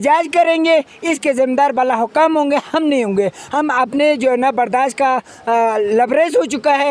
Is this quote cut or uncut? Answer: uncut